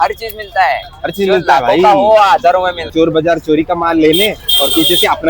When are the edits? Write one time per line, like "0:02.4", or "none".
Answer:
0:02.8